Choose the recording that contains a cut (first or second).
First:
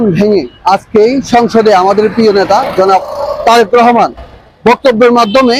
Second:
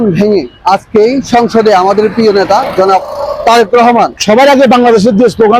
second